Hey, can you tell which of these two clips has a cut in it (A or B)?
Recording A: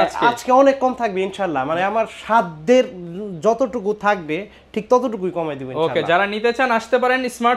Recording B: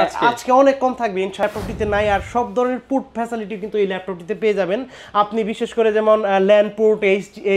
B